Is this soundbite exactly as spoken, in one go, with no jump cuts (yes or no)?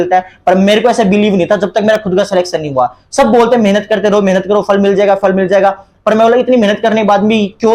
yes